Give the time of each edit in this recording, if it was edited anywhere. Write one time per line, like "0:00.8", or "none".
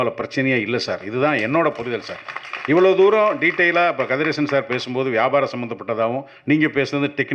none